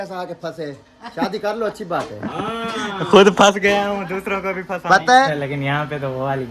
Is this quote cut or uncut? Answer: cut